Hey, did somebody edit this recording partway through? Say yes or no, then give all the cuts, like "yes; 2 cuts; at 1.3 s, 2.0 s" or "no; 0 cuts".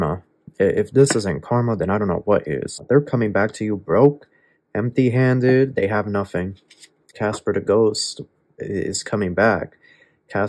yes; 2 cuts; at 2.7 s, 7.1 s